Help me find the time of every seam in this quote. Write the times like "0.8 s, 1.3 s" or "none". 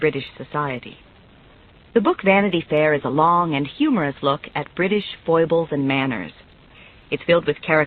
3.2 s